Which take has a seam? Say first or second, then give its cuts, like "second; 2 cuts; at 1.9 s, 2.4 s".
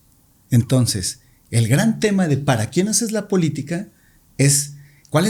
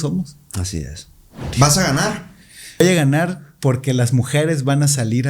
second; 2 cuts; at 1.4 s, 2.8 s